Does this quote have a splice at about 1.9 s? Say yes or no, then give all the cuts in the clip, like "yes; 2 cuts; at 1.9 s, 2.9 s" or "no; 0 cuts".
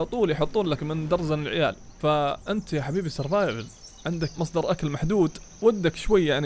yes; 2 cuts; at 1.9 s, 4.3 s